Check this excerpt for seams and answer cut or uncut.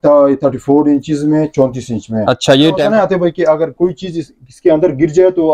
cut